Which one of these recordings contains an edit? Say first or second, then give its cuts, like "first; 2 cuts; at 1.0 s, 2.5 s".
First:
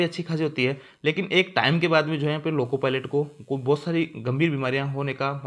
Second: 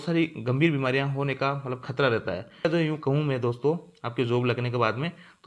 second; 1 cut; at 2.6 s